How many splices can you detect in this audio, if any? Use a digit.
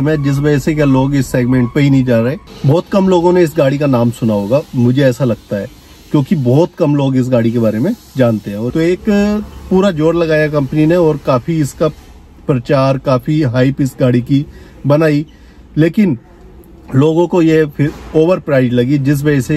2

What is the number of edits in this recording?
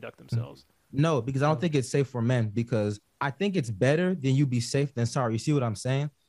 1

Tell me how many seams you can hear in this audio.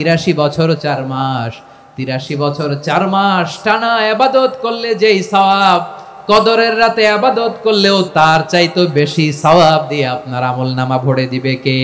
1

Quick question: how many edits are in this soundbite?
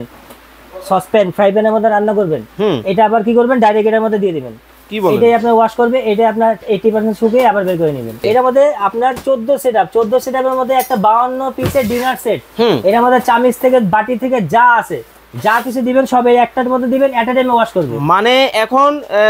1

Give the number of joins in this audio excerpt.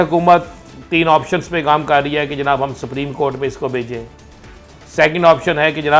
0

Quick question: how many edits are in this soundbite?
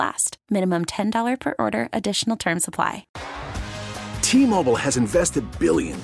1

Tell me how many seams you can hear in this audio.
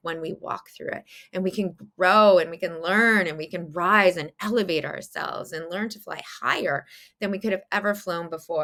0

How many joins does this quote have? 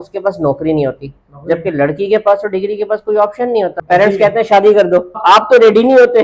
2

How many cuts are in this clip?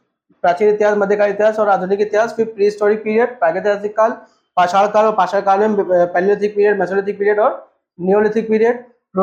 0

